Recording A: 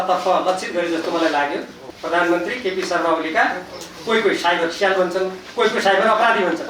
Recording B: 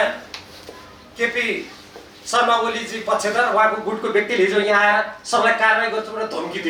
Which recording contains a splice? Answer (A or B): A